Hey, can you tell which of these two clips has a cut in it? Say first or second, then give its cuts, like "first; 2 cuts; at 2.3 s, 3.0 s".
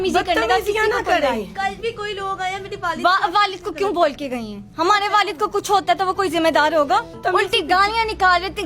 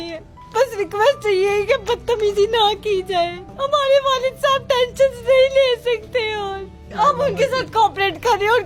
first; 1 cut; at 7.2 s